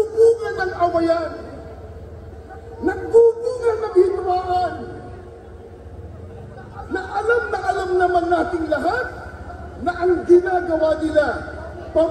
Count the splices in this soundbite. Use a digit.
0